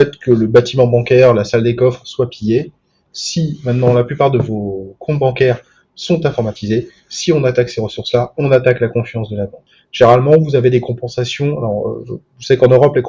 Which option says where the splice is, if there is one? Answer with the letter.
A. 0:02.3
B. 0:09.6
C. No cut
B